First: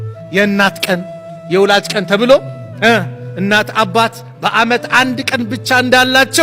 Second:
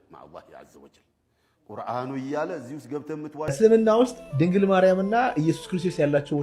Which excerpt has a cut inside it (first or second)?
second